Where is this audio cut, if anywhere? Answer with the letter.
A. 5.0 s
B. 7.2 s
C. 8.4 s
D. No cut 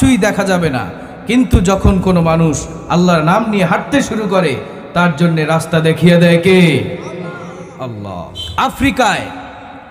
C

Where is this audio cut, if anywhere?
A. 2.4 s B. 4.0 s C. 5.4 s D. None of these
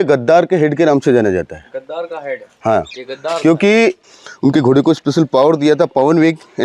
B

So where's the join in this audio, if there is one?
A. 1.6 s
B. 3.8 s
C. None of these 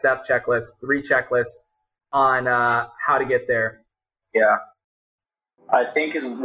B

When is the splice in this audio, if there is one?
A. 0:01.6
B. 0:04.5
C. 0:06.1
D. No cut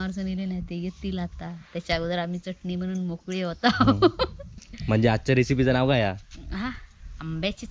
B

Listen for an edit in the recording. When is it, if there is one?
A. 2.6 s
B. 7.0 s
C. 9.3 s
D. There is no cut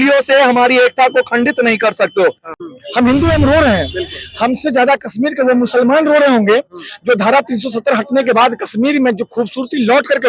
A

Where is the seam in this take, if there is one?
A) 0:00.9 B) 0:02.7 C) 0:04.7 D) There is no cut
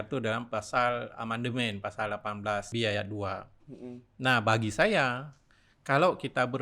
B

